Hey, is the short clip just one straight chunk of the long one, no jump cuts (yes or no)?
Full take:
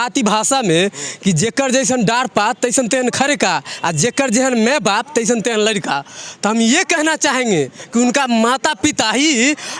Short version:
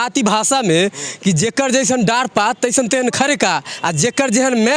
yes